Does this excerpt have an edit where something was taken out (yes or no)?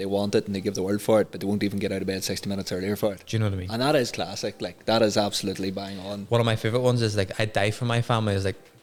no